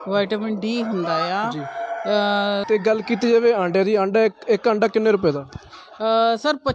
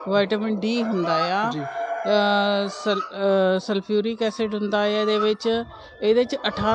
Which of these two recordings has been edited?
first; 1 cut; at 2.6 s

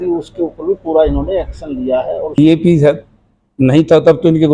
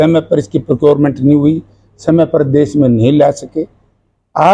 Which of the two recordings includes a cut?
first; 1 cut; at 2.4 s

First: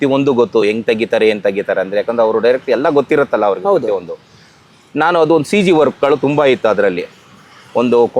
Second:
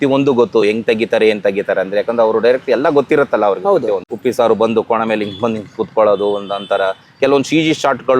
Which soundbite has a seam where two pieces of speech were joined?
second; 1 cut; at 4.1 s

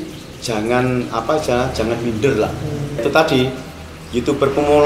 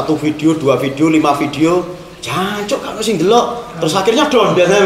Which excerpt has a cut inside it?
first; 1 cut; at 3.0 s

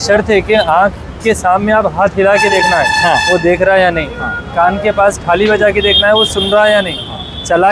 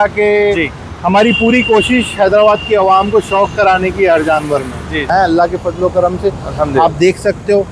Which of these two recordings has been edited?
second; 1 cut; at 5.1 s

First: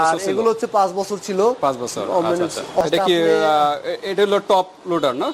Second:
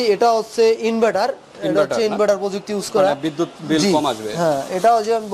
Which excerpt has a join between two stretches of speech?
first; 1 cut; at 2.8 s

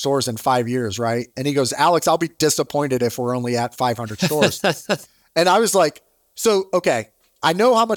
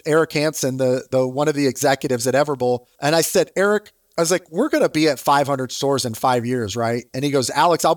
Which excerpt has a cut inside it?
second; 1 cut; at 2.9 s

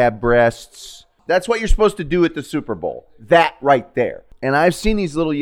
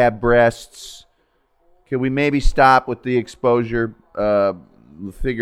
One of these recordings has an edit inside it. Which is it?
first; 2 cuts; at 1.1 s, 4.3 s

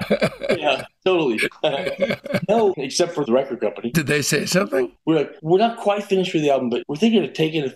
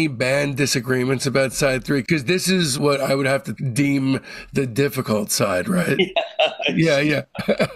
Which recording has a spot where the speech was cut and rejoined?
first; 3 cuts; at 3.2 s, 5.0 s, 6.8 s

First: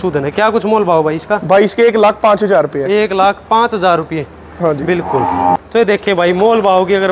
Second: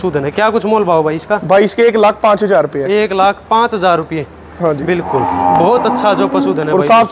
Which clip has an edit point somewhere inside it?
first; 1 cut; at 5.6 s

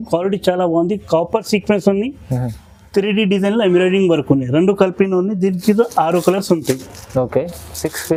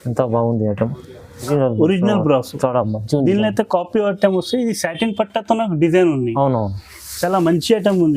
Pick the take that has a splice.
second; 1 cut; at 1.5 s

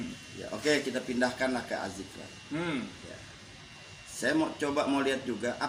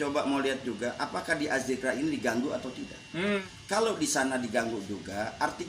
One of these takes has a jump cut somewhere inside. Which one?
second; 1 cut; at 3.4 s

